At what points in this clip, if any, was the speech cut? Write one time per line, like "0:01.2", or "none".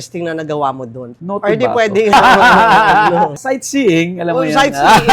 0:01.1
0:02.1